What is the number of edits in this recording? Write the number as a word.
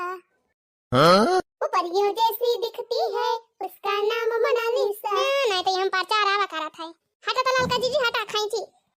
one